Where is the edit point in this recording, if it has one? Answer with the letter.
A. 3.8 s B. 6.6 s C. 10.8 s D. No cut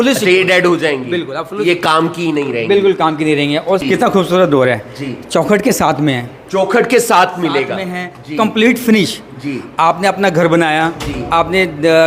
A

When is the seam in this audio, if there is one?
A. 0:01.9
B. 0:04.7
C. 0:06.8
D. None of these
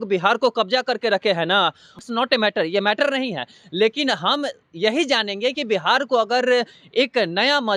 A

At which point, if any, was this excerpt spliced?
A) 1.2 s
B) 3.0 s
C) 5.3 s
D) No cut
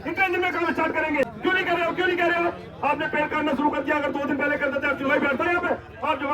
A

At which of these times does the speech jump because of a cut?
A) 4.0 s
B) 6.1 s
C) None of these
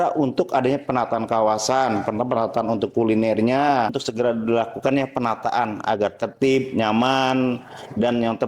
A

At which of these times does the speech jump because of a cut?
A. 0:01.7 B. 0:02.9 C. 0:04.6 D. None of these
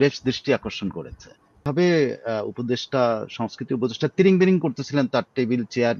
A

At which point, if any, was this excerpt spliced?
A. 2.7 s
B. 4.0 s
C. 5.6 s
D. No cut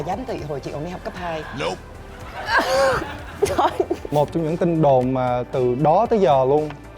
B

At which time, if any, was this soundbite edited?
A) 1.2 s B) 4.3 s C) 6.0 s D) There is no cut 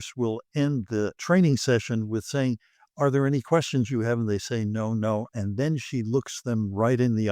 A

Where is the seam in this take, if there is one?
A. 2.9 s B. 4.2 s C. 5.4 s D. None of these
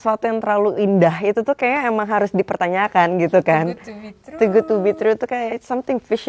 D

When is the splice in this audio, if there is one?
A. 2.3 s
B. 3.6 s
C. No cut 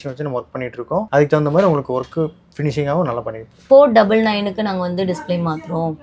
B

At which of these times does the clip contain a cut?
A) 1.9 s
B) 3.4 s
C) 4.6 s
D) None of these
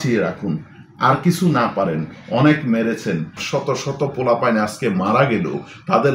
B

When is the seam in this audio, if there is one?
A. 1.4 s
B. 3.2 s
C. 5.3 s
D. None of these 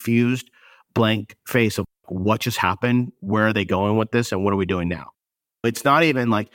D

